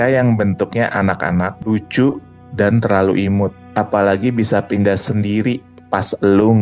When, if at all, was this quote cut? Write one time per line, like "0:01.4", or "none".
0:01.6
0:03.6